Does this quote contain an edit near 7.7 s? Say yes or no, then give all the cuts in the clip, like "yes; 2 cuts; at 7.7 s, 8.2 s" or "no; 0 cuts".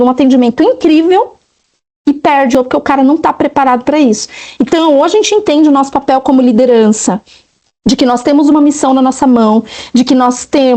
no; 1 cut; at 2.5 s